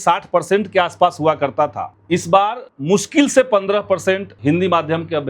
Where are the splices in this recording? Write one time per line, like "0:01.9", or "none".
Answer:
0:01.9
0:02.7
0:04.3

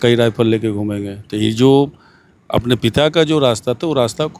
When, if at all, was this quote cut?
none

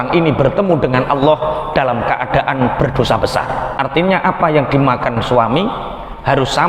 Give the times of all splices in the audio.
0:03.7

